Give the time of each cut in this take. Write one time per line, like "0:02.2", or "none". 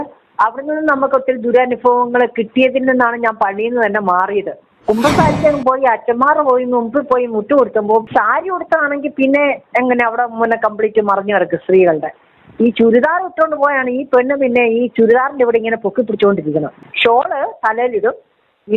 0:04.7
0:08.1

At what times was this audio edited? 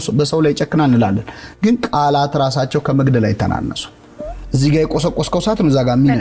none

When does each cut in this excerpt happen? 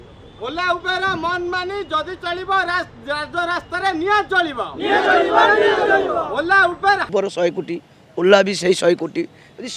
0:07.1

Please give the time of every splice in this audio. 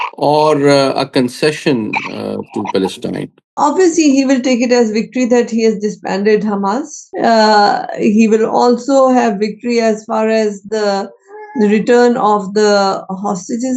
0:03.6
0:07.0

